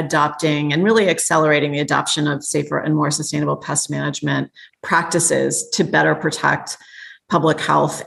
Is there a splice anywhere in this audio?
no; 0 cuts

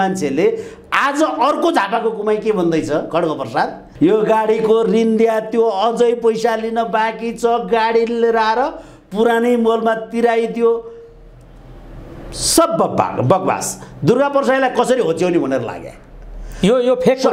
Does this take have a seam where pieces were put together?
no; 0 cuts

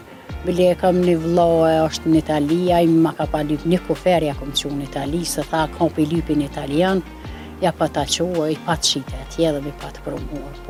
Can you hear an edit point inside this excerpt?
no; 0 cuts

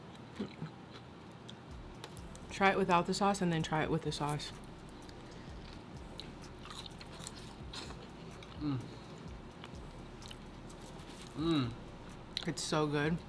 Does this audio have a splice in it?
yes; 2 cuts; at 1.2 s, 8.5 s

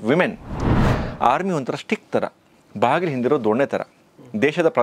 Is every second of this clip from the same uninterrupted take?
no; 1 cut; at 0.9 s

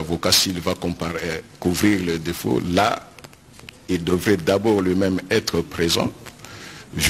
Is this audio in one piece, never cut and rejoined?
yes; 0 cuts

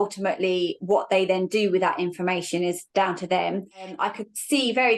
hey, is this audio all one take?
no; 1 cut; at 3.9 s

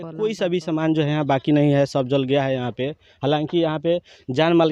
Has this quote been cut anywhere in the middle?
no; 0 cuts

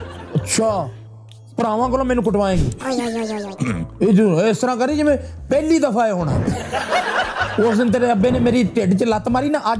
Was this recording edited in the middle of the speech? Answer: no; 0 cuts

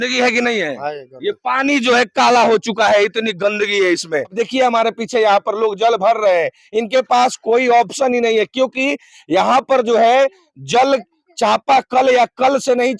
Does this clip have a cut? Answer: yes; 1 cut; at 4.3 s

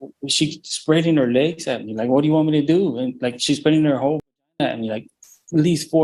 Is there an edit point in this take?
no; 0 cuts

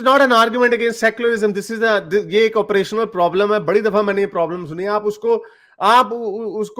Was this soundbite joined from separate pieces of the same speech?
no; 0 cuts

